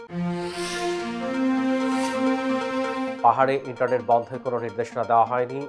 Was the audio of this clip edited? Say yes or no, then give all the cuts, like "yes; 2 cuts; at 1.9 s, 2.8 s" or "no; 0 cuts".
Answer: no; 0 cuts